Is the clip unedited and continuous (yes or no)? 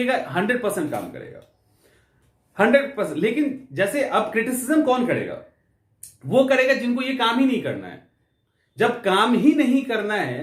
yes